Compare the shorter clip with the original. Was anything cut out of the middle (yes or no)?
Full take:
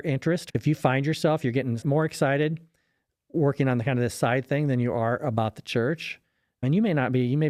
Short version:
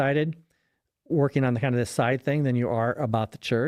no